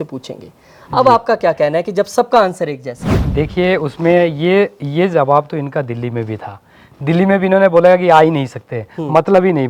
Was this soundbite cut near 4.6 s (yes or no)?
no